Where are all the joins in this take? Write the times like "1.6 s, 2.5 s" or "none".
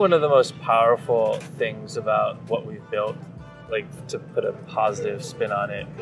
none